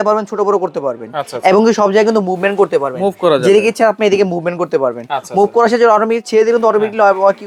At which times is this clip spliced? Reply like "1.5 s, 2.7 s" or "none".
none